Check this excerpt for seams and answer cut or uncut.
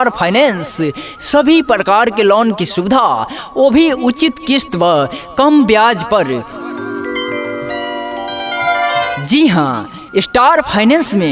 cut